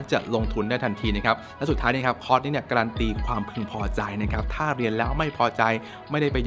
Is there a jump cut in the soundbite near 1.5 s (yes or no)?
no